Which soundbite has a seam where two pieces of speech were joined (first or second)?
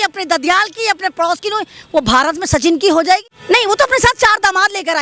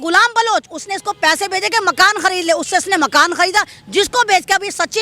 first